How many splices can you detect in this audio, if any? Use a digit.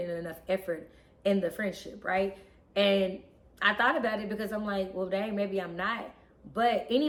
0